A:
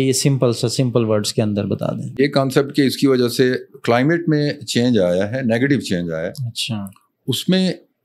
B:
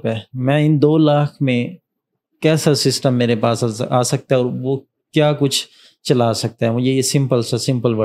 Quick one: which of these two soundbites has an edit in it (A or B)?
A